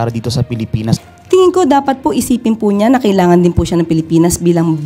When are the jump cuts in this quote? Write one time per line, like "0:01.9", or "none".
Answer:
0:01.0